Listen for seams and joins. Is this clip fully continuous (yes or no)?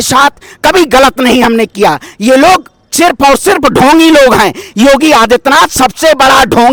yes